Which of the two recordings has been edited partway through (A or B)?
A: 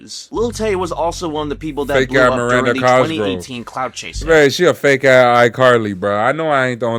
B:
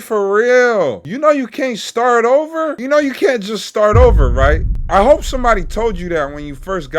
B